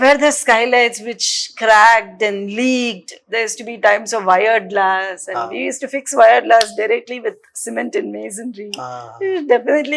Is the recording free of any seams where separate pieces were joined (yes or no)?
yes